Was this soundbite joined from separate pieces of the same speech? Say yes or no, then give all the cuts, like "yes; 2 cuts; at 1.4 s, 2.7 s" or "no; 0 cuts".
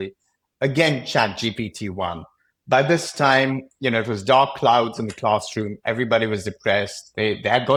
no; 0 cuts